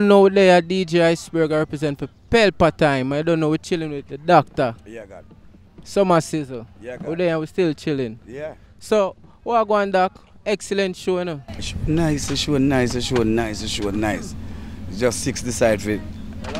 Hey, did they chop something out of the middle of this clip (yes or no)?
no